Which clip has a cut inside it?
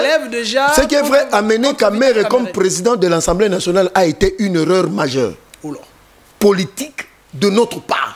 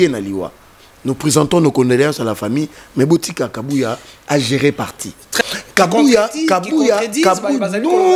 second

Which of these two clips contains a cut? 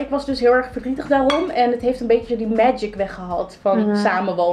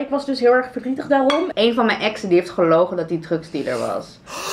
second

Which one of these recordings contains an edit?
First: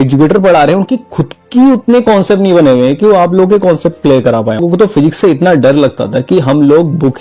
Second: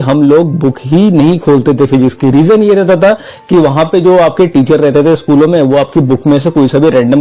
first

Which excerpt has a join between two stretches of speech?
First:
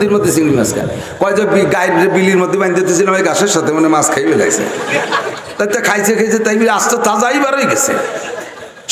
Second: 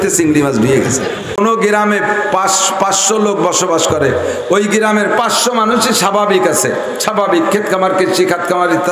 second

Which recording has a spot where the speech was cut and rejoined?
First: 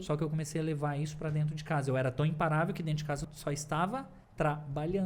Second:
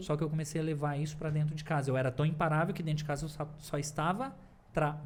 first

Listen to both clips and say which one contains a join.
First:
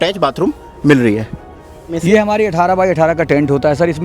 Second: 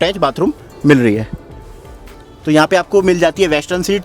first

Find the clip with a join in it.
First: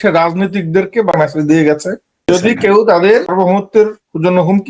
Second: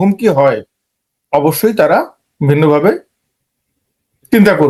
first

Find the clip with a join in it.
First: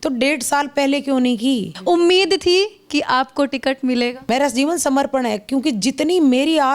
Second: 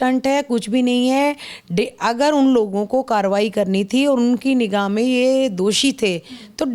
first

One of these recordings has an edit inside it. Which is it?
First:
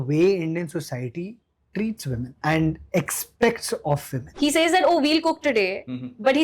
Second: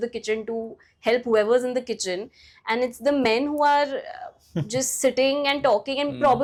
first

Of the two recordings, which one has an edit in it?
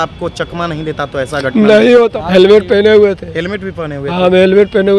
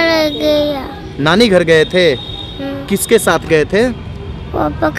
first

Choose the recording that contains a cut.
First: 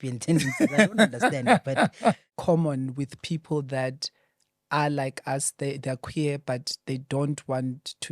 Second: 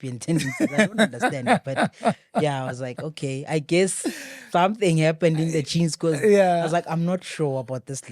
first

